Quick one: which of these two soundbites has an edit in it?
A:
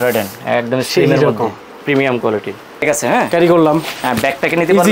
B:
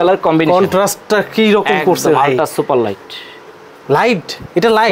A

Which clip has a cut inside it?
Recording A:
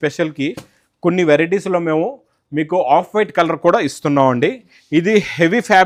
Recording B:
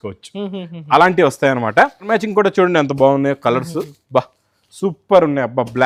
B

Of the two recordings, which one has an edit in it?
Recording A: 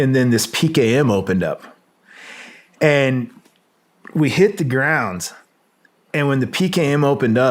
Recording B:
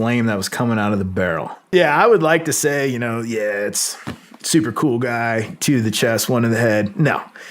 B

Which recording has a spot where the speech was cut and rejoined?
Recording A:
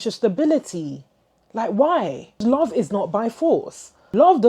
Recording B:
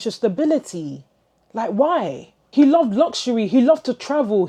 A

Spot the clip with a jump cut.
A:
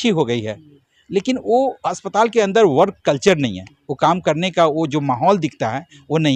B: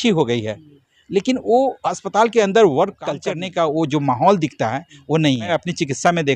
B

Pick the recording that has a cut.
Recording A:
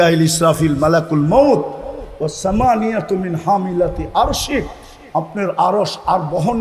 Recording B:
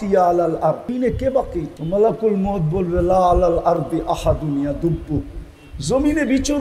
B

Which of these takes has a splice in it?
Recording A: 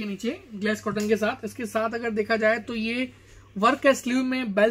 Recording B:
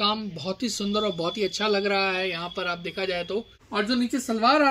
B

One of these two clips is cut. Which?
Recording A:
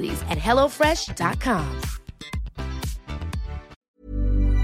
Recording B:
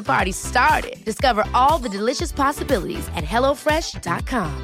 A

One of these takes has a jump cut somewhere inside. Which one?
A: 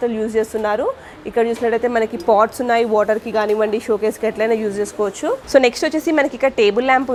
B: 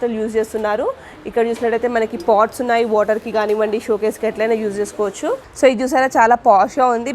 B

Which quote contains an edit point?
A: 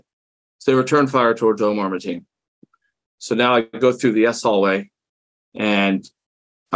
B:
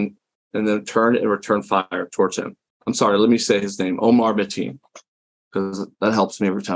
B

